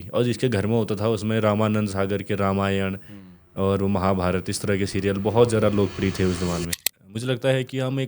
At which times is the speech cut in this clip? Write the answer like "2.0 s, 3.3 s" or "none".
6.8 s